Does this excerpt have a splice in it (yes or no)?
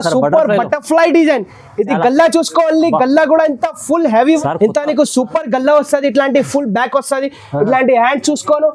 yes